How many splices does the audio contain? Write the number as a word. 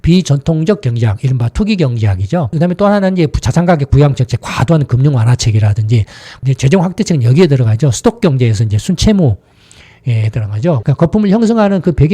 three